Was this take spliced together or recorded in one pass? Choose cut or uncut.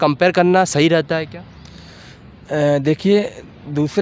uncut